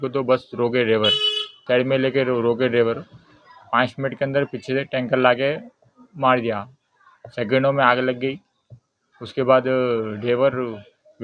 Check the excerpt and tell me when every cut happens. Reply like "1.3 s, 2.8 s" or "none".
1.5 s

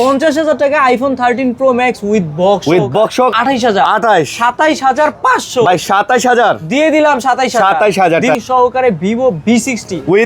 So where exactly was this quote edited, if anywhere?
3.3 s, 8.4 s

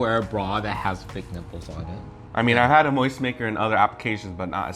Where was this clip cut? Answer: 2.1 s

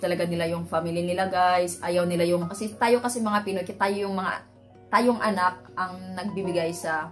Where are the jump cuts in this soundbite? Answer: 2.5 s

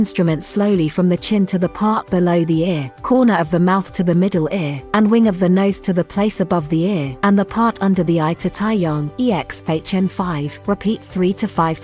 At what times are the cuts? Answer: 2.9 s, 4.8 s, 7.1 s, 9.1 s, 10.5 s

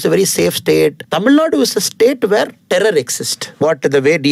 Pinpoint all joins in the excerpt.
1.0 s, 2.6 s, 3.6 s

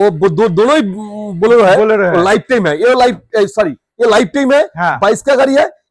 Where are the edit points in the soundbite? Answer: none

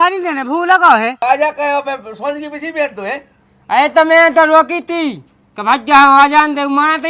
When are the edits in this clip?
1.2 s

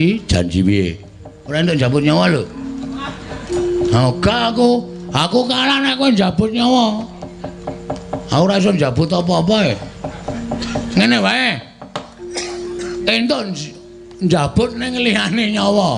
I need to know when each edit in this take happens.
none

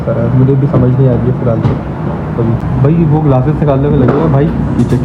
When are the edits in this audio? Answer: none

